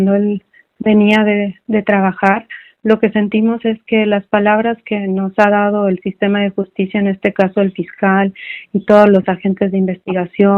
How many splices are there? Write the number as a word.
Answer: zero